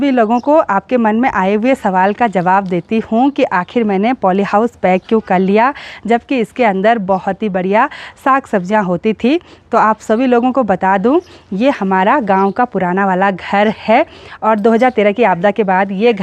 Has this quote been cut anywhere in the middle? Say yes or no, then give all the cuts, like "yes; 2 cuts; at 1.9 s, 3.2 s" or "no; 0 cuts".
no; 0 cuts